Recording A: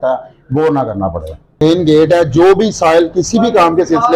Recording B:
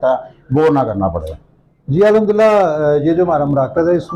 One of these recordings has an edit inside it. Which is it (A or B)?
A